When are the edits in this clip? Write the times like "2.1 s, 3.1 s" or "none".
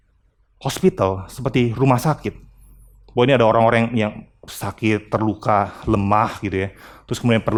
none